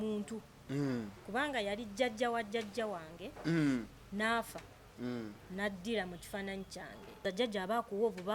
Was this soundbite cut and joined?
yes; 1 cut; at 7.2 s

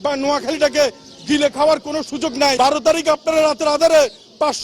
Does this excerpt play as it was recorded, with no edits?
no; 1 cut; at 2.5 s

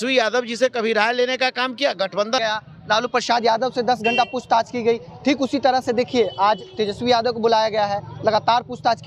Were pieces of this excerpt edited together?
yes; 1 cut; at 2.4 s

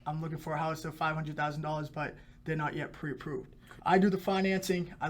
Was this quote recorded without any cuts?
no; 1 cut; at 3.6 s

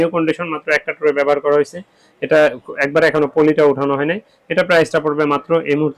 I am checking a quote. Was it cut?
no; 0 cuts

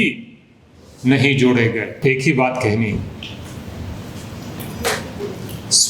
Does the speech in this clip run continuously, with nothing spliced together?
no; 1 cut; at 1.9 s

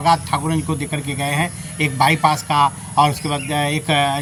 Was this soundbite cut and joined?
no; 0 cuts

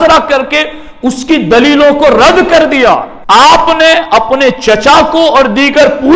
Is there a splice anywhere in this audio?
yes; 1 cut; at 3.1 s

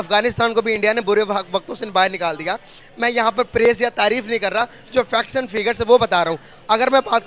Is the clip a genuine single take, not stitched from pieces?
yes; 0 cuts

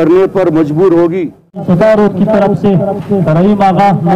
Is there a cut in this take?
yes; 1 cut; at 1.6 s

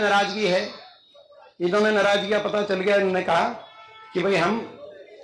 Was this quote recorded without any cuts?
yes; 0 cuts

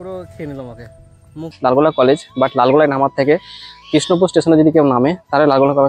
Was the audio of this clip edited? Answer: yes; 1 cut; at 1.5 s

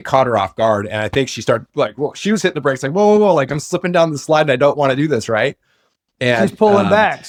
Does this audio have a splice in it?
no; 0 cuts

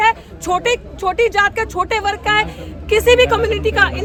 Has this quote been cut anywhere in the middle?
no; 0 cuts

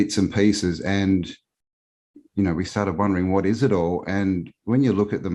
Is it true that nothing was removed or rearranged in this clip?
yes; 0 cuts

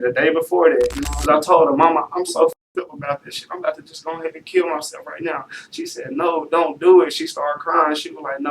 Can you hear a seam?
yes; 1 cut; at 1.1 s

